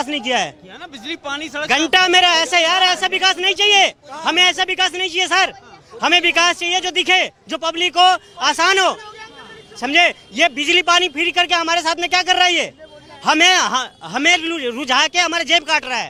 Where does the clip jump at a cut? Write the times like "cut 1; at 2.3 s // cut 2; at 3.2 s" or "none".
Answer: none